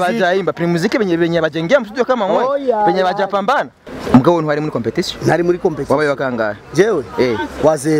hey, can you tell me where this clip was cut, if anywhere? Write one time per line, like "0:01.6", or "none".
0:03.8